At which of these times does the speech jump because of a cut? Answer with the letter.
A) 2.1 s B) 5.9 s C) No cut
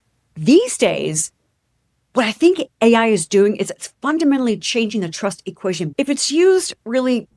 B